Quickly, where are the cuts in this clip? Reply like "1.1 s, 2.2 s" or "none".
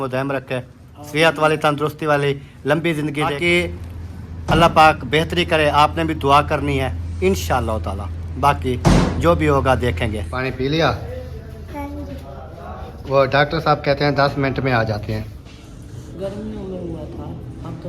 3.4 s, 10.0 s, 15.4 s